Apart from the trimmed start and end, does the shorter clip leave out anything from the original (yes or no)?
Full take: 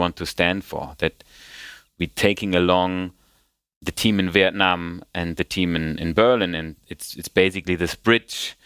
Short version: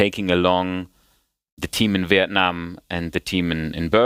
no